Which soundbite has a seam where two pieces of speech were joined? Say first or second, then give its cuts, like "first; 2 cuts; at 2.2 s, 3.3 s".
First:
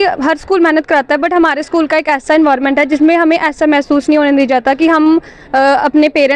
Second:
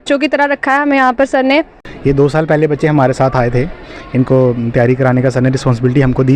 second; 1 cut; at 1.8 s